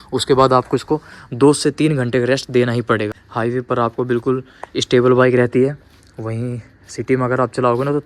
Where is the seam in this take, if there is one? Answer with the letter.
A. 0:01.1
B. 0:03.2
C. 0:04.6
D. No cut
B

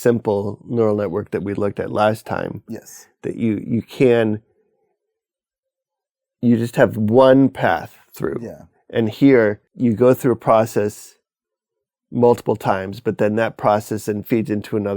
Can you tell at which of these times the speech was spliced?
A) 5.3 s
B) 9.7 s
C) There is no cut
B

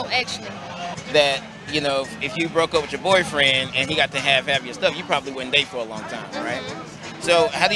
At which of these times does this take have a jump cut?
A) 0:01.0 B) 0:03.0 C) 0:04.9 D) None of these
A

